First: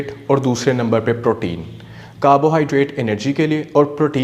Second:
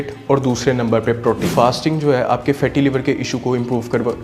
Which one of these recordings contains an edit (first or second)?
second